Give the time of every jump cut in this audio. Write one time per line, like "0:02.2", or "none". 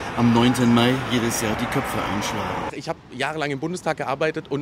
0:02.8